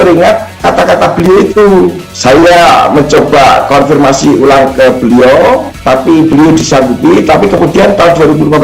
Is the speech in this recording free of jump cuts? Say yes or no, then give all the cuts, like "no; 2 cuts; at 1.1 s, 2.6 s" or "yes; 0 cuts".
no; 1 cut; at 2.0 s